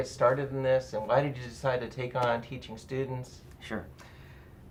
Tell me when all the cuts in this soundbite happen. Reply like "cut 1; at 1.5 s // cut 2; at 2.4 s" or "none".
none